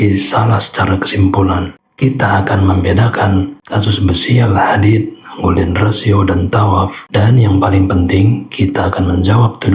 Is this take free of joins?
no; 1 cut; at 3.6 s

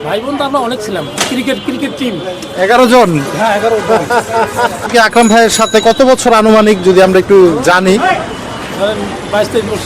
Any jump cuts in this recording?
yes; 1 cut; at 4.9 s

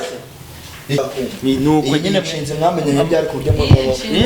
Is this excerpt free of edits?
no; 1 cut; at 1.0 s

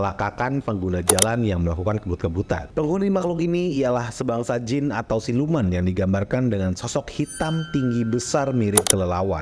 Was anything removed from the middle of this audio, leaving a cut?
yes; 1 cut; at 2.7 s

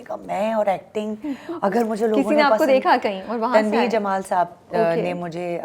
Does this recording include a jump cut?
no; 0 cuts

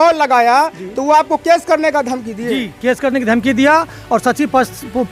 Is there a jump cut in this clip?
no; 0 cuts

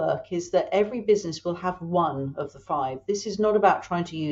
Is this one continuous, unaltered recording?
yes; 0 cuts

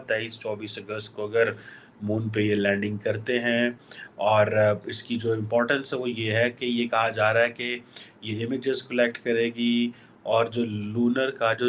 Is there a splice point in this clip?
no; 0 cuts

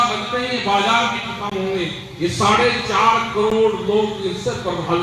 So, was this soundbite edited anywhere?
no; 0 cuts

